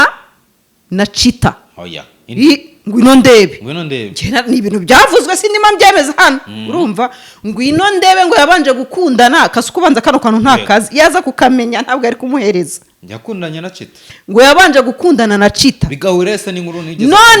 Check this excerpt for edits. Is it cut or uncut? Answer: uncut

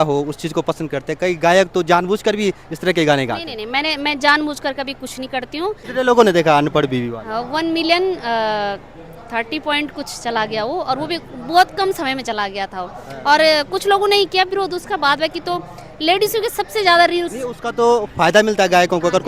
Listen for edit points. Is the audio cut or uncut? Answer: cut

